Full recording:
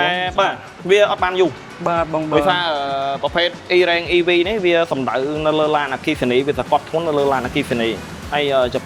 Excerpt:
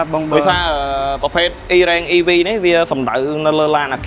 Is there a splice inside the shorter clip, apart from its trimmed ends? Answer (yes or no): no